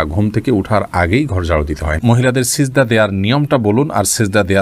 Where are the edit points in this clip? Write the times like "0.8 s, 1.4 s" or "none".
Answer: 2.0 s